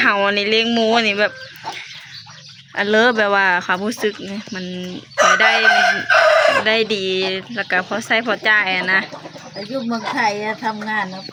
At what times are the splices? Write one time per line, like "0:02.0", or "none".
none